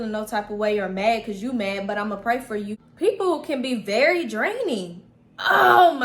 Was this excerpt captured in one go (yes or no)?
no